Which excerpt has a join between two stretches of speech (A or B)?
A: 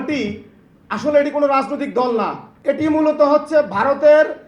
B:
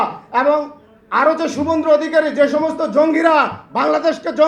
A